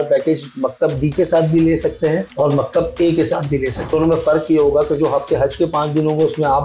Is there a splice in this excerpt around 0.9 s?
no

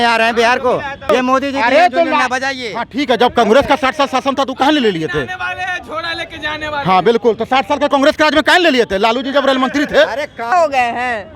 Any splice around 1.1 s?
yes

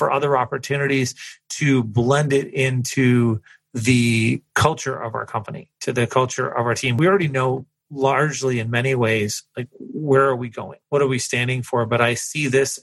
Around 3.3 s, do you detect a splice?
no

